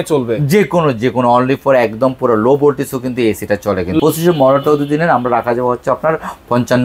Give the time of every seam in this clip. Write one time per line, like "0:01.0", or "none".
0:04.0